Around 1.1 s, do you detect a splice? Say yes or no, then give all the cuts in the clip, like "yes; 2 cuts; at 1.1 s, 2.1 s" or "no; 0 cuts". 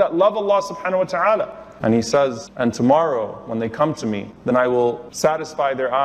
no; 3 cuts; at 2.5 s, 4.3 s, 5.1 s